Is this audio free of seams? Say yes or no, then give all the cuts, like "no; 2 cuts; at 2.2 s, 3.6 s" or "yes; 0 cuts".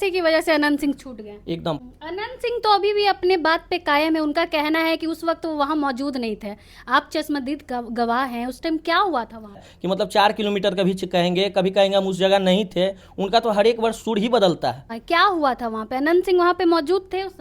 no; 3 cuts; at 1.8 s, 9.7 s, 14.9 s